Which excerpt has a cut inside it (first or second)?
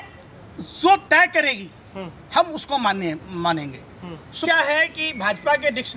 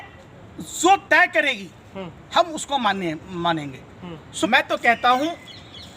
second